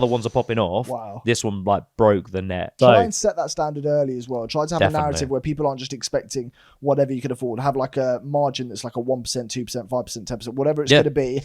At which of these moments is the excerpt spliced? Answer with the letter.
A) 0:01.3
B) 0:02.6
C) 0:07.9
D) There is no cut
B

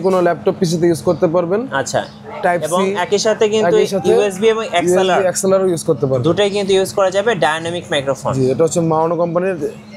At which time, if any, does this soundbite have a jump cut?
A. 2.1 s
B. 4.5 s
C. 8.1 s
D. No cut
D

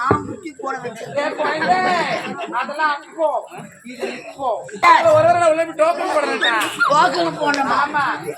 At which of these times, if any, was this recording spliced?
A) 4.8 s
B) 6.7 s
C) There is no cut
A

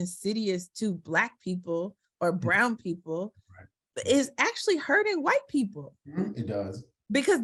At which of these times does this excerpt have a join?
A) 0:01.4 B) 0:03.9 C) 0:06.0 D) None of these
D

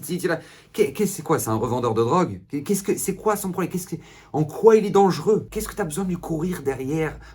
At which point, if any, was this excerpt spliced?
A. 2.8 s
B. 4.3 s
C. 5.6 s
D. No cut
C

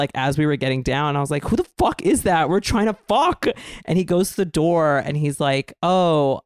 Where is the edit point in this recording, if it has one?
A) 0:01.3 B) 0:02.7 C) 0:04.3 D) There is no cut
D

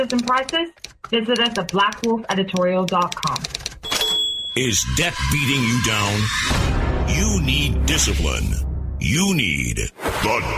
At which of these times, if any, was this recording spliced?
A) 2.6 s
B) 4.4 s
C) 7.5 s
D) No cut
B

